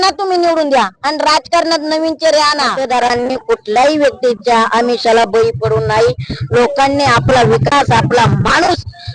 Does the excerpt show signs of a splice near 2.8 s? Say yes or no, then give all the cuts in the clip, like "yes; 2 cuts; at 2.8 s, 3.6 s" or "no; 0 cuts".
yes; 1 cut; at 2.8 s